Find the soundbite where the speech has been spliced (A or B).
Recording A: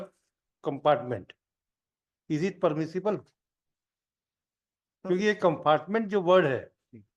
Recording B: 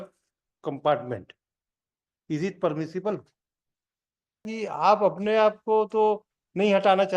B